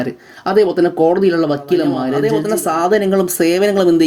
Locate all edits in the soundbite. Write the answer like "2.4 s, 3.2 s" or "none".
2.1 s